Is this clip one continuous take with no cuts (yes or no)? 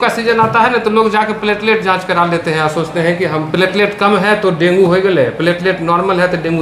yes